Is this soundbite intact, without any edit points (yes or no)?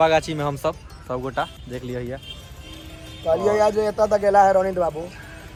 yes